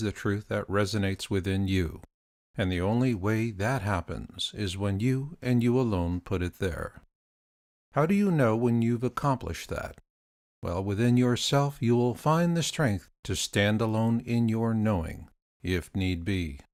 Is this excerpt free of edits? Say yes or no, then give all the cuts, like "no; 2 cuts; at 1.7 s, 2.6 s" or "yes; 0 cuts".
yes; 0 cuts